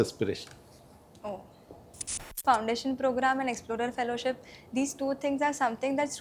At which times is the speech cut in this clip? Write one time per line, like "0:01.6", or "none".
0:02.4